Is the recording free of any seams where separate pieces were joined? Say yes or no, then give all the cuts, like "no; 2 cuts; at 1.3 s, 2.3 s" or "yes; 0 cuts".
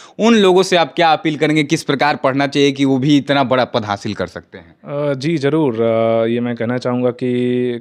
yes; 0 cuts